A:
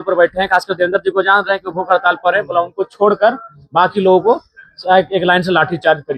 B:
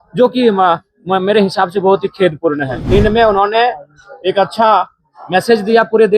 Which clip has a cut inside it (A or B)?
B